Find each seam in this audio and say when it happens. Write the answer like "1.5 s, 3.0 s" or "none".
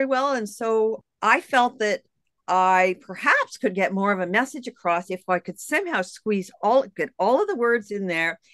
none